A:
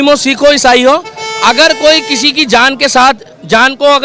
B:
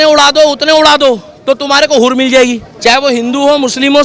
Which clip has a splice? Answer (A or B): B